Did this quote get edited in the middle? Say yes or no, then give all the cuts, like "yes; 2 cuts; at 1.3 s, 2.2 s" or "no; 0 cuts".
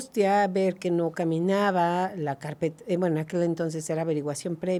no; 0 cuts